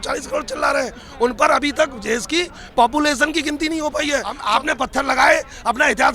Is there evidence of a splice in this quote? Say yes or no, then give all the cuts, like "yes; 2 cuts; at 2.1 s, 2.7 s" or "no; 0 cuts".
yes; 1 cut; at 4.4 s